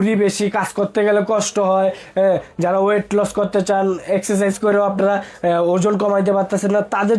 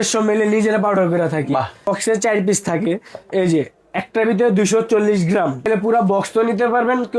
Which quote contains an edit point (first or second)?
second